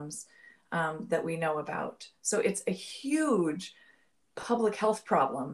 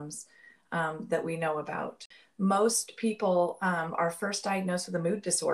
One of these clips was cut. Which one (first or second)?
second